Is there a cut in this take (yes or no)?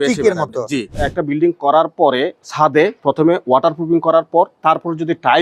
yes